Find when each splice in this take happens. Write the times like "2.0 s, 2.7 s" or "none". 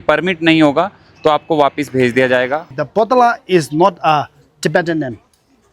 2.8 s